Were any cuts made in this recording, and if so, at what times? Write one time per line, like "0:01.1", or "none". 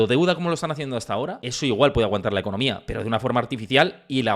0:01.4